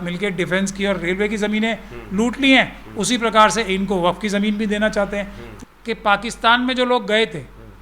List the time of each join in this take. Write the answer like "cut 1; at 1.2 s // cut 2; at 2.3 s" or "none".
cut 1; at 5.5 s